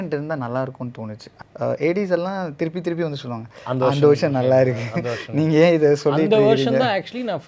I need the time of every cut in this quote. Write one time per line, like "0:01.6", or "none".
0:01.3

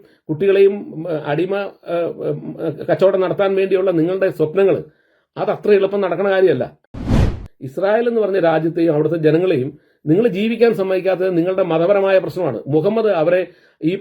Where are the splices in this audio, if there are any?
0:07.2

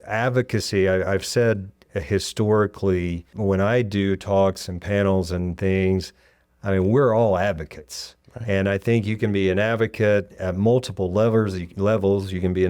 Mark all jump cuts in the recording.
0:03.3

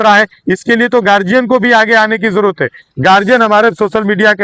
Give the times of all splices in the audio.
none

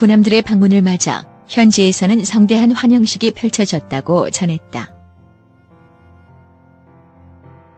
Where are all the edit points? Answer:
0:05.6

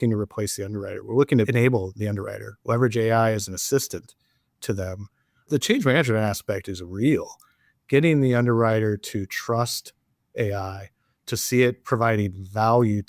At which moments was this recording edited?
0:01.5

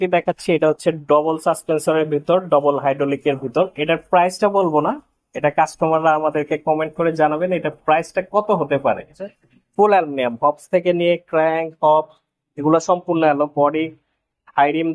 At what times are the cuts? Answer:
0:09.2

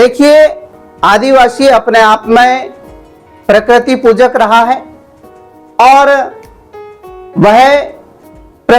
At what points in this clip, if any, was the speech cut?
none

